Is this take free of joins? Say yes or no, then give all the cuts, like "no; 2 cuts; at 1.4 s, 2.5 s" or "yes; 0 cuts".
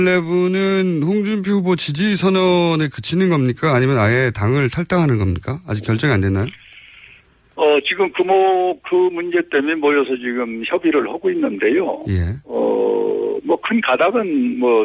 no; 1 cut; at 8.5 s